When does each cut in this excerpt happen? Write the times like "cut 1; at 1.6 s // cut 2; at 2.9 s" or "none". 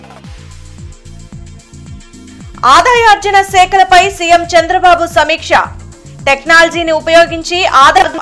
none